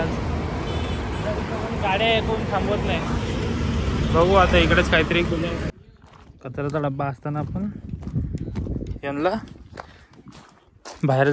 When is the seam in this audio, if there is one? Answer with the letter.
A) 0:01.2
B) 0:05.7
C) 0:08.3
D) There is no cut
B